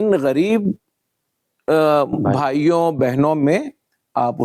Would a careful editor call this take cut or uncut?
uncut